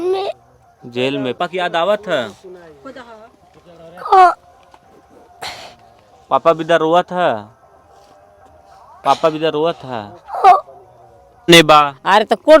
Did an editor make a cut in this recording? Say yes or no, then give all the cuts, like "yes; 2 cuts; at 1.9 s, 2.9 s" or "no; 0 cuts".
yes; 2 cuts; at 1.4 s, 11.5 s